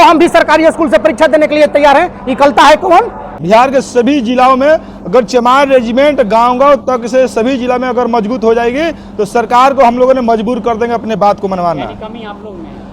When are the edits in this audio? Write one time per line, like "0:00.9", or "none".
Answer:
0:03.4